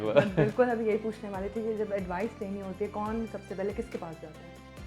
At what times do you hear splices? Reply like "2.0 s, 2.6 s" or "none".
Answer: none